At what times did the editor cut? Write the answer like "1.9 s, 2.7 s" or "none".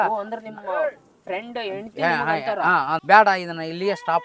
3.0 s